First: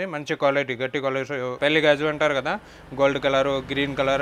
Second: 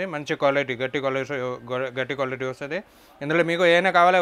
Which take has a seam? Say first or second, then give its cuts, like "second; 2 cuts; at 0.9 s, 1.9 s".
first; 1 cut; at 1.6 s